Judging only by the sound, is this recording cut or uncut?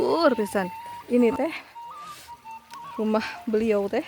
cut